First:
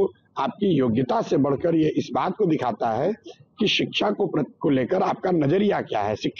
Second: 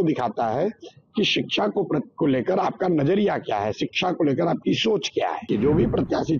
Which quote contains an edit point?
second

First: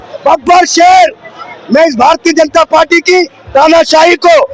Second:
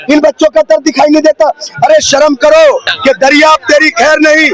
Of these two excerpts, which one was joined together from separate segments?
second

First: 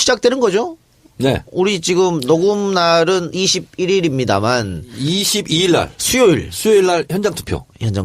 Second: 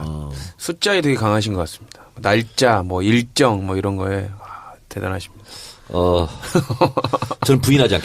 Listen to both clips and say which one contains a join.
second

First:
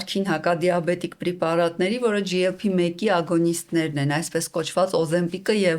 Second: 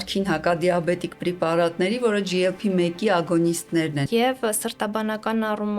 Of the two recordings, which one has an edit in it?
second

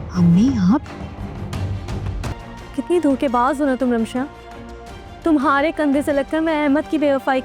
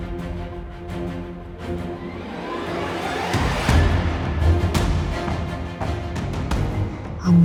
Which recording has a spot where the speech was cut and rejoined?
first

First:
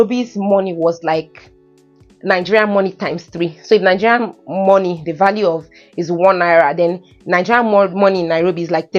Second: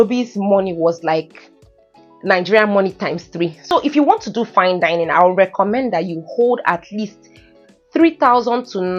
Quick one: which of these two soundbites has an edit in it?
second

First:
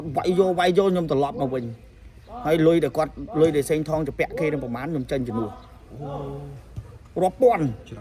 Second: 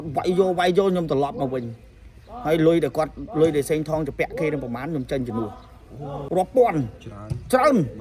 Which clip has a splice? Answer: second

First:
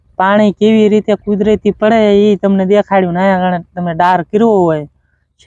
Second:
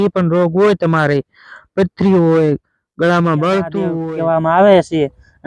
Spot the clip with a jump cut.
second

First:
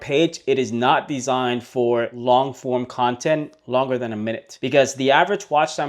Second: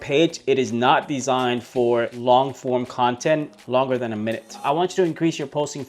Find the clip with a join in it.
second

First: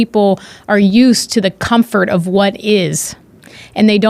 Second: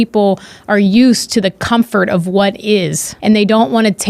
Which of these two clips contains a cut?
second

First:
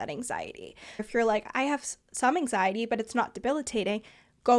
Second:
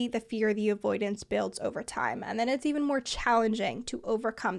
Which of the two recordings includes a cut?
first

